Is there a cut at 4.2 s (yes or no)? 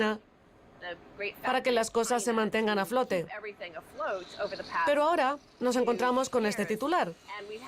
no